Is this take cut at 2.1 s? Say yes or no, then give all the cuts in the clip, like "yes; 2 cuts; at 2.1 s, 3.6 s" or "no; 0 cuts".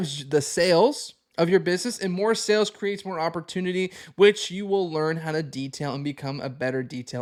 no; 0 cuts